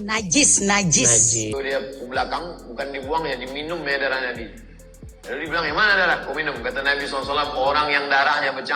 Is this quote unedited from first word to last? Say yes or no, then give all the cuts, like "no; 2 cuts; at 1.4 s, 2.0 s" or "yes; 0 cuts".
no; 1 cut; at 1.5 s